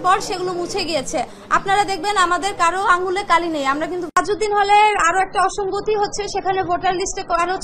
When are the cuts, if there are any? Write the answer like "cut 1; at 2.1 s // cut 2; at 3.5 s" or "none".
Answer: cut 1; at 4.2 s